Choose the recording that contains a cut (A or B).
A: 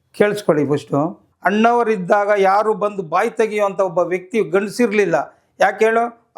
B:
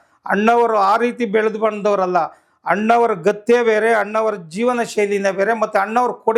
A